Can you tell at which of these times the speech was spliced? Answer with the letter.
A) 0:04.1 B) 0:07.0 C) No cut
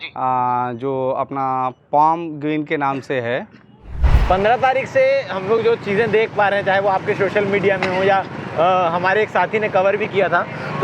A